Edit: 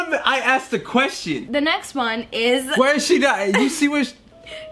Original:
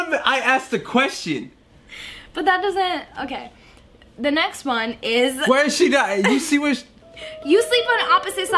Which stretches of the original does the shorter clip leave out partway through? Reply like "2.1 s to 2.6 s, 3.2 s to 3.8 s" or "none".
1.4 s to 4.1 s

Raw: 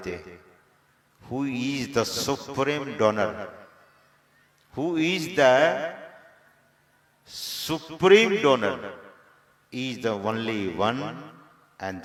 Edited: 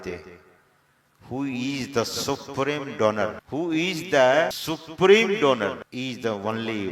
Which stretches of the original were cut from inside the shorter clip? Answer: 3.4 s to 4.7 s, 5.8 s to 7.6 s, 8.9 s to 9.6 s

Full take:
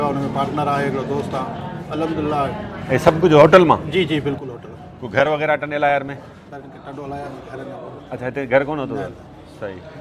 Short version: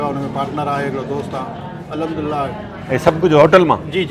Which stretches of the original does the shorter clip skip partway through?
none

